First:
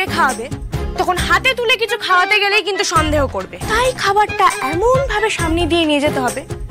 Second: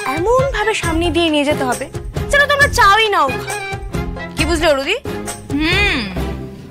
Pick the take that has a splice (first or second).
first